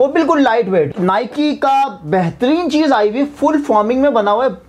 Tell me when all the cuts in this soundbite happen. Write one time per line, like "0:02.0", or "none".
0:00.9